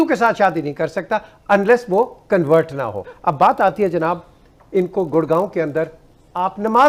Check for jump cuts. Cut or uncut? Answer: uncut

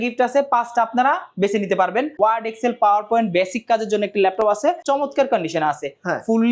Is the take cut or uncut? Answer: cut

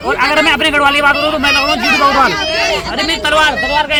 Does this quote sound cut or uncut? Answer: uncut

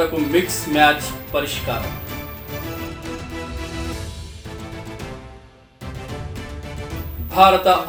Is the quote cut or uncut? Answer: uncut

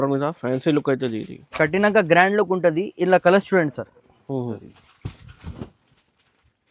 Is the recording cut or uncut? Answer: cut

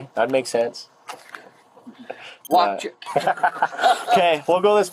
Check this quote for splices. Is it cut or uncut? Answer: uncut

